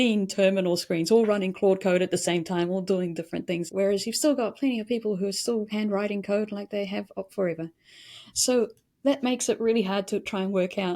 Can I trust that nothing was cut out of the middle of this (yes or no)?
no